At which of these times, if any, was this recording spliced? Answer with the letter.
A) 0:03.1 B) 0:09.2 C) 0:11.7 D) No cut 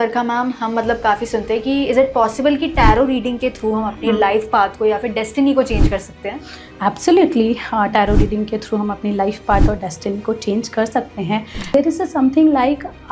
C